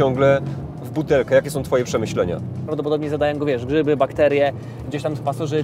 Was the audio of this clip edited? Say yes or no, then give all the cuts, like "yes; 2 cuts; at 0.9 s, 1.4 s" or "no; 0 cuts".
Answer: yes; 1 cut; at 2.6 s